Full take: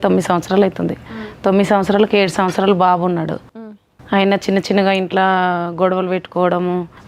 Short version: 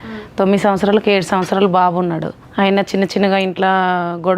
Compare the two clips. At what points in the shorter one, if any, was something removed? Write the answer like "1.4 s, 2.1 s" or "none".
2.4 s

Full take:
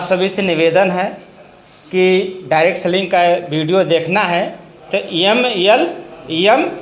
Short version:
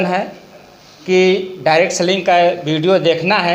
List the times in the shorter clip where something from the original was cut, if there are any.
none

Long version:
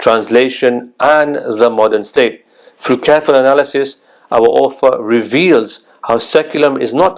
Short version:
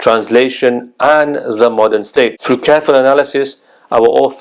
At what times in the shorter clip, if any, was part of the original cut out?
2.4 s

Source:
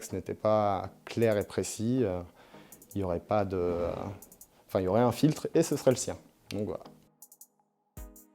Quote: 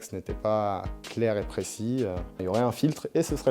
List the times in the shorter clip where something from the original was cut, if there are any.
2.4 s

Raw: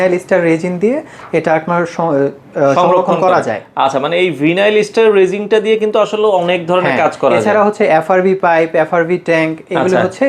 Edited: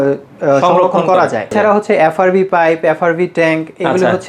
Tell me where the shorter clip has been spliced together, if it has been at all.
1.5 s

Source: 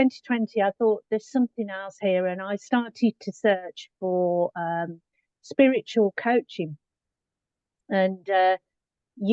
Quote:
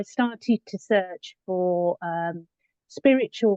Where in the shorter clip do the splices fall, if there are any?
none

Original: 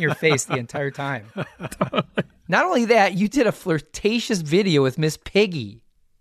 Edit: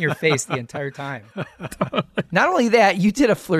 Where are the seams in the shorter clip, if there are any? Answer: 2.3 s

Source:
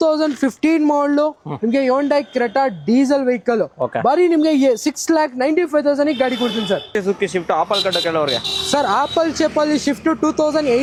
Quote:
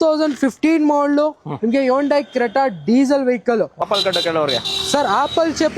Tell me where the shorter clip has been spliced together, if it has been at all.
3.8 s

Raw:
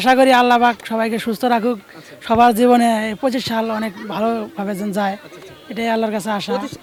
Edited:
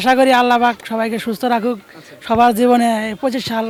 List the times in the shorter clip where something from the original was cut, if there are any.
none

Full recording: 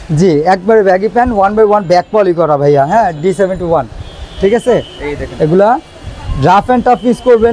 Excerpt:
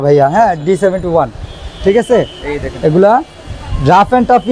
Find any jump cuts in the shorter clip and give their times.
none

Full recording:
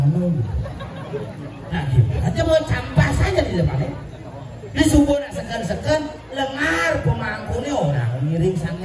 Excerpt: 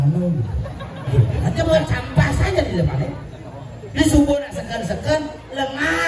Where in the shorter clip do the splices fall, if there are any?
1.1 s

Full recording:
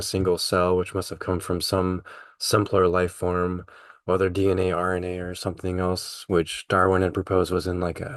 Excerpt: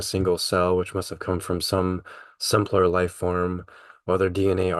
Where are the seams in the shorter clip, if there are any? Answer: none

